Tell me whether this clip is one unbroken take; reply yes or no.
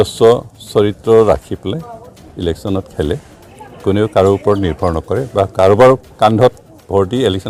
yes